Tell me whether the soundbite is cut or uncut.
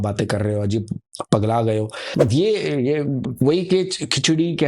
cut